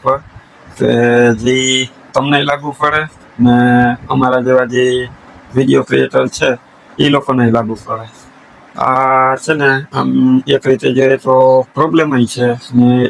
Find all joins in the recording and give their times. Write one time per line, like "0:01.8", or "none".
none

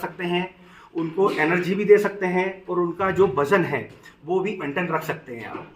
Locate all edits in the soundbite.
0:04.6

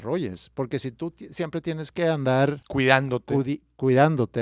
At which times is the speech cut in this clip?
0:02.6

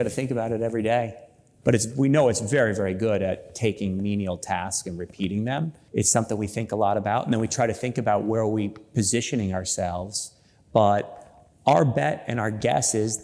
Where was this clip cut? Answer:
0:01.4
0:05.8

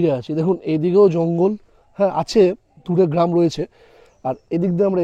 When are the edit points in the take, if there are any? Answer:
none

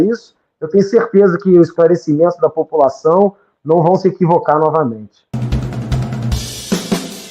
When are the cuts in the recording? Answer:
0:05.1

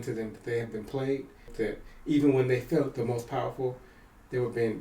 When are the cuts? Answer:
0:01.5

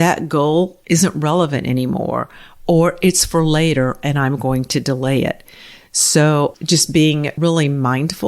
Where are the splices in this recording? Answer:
0:07.3

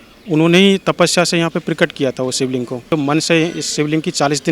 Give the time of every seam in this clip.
0:02.9

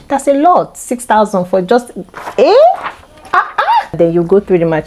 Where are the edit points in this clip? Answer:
0:03.9

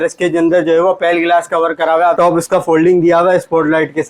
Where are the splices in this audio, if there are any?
0:02.1

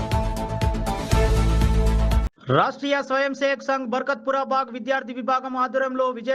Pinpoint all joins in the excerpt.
0:02.2

